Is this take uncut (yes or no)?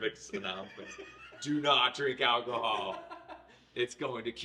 yes